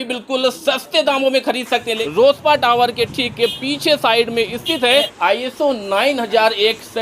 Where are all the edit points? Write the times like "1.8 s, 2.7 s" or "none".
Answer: 2.0 s, 5.1 s